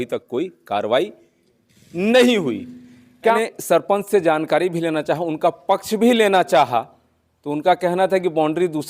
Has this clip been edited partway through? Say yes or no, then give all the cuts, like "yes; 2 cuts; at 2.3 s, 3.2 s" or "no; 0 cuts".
yes; 1 cut; at 3.3 s